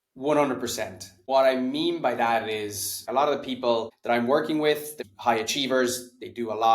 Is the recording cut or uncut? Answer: cut